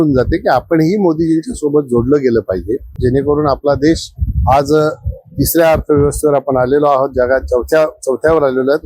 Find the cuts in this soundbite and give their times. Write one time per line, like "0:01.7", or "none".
0:03.0